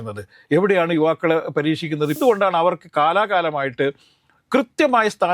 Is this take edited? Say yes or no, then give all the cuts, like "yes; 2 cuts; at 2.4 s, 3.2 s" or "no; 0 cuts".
yes; 1 cut; at 2.2 s